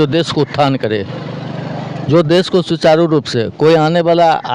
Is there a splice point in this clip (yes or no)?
no